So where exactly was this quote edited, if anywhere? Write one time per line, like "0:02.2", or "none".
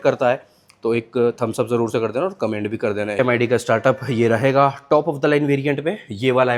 0:03.2